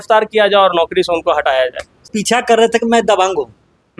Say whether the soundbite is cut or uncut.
cut